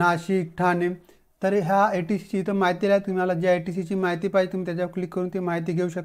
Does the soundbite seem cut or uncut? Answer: uncut